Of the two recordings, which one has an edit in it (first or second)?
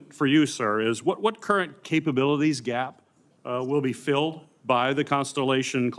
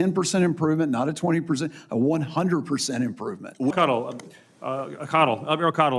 second